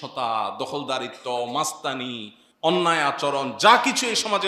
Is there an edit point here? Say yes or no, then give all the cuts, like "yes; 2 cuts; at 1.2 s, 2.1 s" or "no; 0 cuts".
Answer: no; 0 cuts